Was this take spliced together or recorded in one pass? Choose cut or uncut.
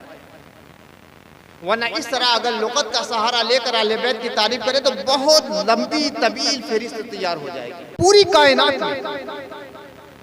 cut